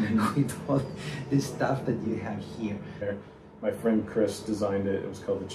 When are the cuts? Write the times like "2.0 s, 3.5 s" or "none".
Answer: 3.0 s